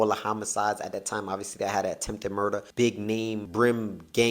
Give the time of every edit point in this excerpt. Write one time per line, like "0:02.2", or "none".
0:02.7
0:03.4